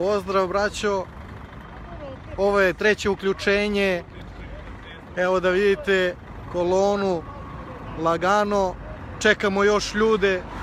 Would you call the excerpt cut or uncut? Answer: uncut